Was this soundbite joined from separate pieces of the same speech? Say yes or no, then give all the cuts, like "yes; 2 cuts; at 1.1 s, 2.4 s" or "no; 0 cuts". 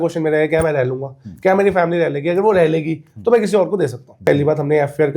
yes; 1 cut; at 4.2 s